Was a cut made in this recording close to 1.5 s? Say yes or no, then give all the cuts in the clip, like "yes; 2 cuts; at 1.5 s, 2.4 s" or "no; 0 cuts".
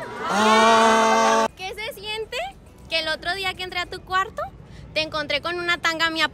yes; 1 cut; at 1.5 s